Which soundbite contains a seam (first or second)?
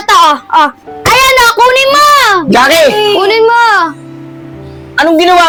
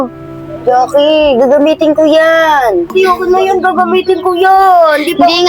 second